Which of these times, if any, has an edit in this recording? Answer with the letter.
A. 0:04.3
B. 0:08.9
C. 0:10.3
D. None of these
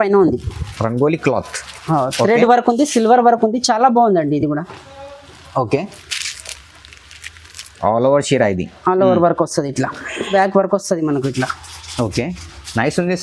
C